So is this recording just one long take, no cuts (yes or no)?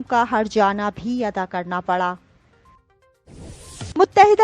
no